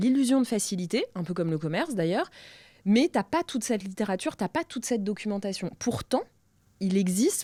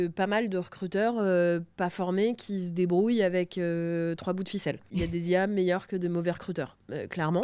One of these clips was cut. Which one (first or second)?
second